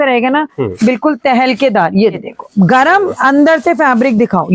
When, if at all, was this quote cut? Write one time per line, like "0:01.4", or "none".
0:02.2